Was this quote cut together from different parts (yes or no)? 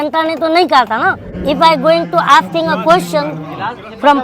yes